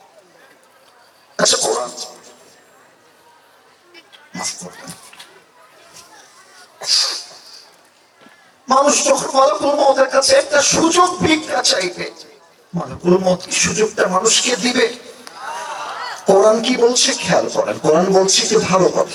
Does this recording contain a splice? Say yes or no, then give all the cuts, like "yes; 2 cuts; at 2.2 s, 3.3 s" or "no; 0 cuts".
no; 0 cuts